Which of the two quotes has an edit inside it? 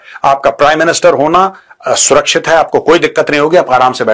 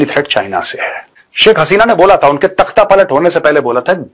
second; 1 cut; at 1.2 s

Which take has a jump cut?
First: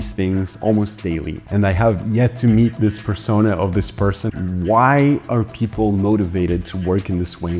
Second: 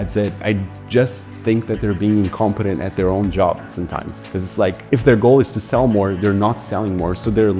first; 2 cuts; at 1.3 s, 4.3 s

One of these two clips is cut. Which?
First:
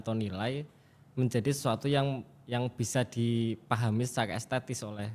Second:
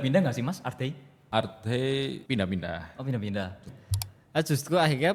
second; 3 cuts; at 1.1 s, 2.2 s, 3.6 s

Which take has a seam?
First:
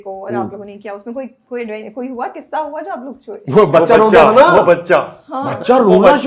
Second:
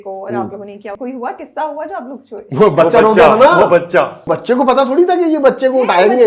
second; 2 cuts; at 1.0 s, 4.3 s

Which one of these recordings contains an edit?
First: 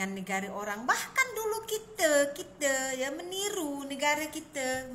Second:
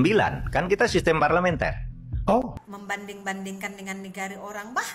second; 1 cut; at 2.5 s

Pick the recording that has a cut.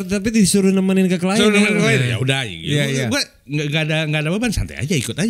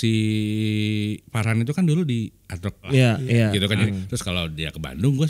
second; 2 cuts; at 2.8 s, 3.8 s

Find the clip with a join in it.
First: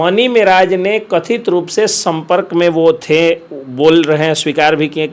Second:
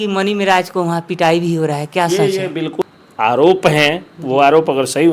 second; 1 cut; at 2.7 s

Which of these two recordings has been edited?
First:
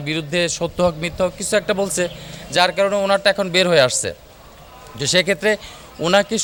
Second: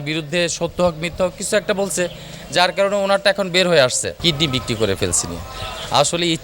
second; 1 cut; at 4.2 s

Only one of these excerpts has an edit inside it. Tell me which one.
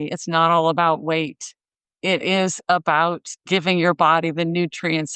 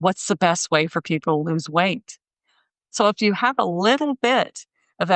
second; 1 cut; at 2.8 s

